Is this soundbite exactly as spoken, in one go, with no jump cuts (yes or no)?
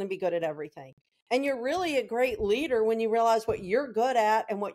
yes